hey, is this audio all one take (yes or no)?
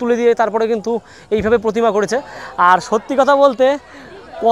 yes